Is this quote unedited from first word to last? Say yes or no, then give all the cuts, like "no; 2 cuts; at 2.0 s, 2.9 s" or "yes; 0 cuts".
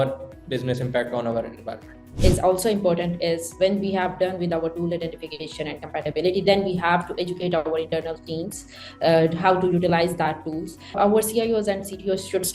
no; 2 cuts; at 2.1 s, 10.9 s